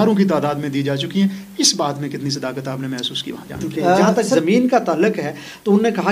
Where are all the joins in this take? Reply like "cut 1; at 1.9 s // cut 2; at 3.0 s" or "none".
cut 1; at 4.1 s